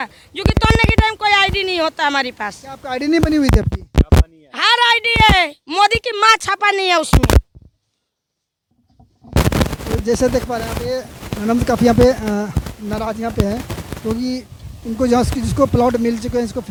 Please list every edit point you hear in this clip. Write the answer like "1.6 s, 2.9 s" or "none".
none